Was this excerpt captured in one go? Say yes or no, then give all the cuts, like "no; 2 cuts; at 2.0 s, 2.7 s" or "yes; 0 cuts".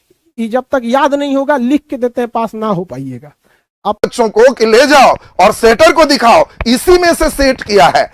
no; 1 cut; at 4.1 s